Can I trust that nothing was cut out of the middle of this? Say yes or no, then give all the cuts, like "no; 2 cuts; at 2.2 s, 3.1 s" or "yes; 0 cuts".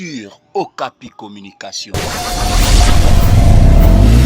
no; 1 cut; at 1.1 s